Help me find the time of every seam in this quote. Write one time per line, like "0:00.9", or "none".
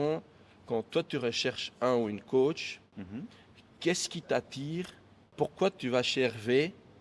0:05.3